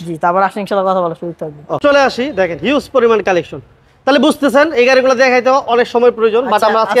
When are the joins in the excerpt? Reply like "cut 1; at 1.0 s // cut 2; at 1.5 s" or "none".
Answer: cut 1; at 1.8 s